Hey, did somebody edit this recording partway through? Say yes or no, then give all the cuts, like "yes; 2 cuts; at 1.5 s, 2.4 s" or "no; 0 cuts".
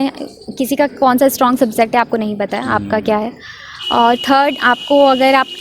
no; 0 cuts